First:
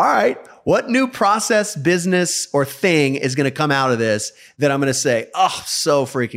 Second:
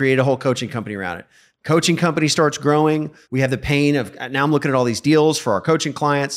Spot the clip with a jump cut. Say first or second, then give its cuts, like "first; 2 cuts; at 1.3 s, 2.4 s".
second; 1 cut; at 3.2 s